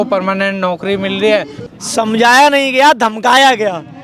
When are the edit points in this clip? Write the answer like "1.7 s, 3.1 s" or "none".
1.6 s